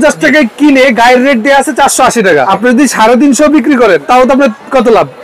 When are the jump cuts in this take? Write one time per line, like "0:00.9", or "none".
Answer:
0:02.5
0:04.0

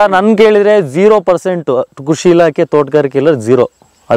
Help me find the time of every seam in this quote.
none

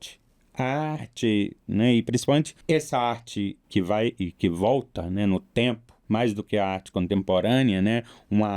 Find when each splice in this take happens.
0:02.5
0:03.6
0:05.9

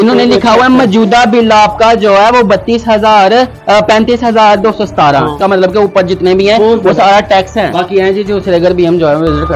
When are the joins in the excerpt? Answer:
0:05.4
0:07.8

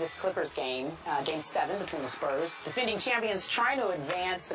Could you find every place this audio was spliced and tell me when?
none

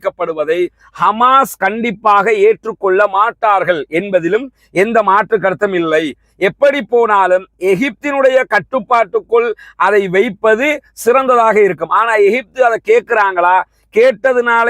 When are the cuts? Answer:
none

